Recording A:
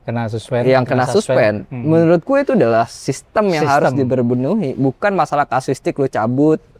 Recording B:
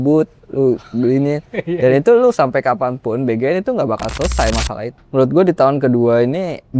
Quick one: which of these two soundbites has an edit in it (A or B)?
B